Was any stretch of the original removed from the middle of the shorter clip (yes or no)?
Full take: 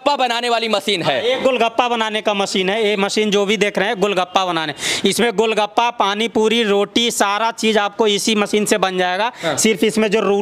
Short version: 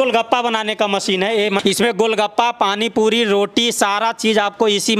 yes